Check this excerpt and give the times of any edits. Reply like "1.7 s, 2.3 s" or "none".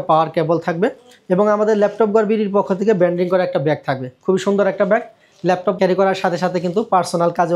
5.8 s